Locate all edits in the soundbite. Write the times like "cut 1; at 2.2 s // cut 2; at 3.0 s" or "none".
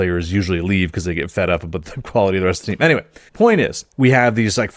cut 1; at 3.2 s // cut 2; at 3.8 s